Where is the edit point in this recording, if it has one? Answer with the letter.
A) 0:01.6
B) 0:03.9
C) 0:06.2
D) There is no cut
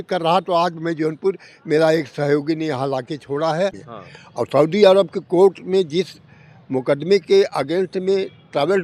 B